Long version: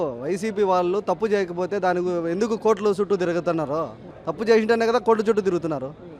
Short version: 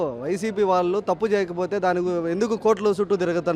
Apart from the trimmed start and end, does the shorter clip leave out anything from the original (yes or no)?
no